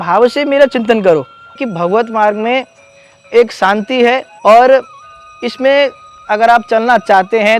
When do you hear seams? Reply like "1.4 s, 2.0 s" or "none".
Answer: 1.6 s, 4.3 s